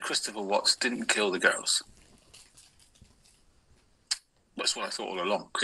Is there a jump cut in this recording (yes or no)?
no